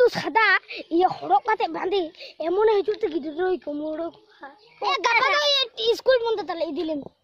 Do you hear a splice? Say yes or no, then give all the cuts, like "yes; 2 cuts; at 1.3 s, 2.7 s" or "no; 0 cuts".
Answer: yes; 1 cut; at 4.7 s